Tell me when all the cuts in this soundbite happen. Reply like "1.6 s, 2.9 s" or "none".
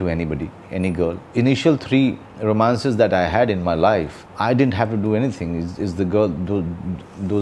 none